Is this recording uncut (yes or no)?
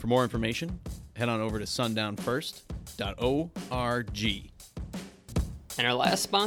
no